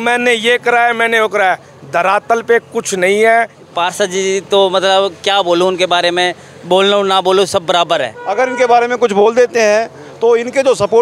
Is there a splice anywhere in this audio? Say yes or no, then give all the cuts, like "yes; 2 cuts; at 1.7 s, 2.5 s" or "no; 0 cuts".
yes; 2 cuts; at 3.6 s, 8.2 s